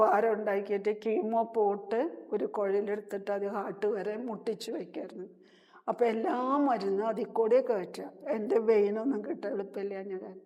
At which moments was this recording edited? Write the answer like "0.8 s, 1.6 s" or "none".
none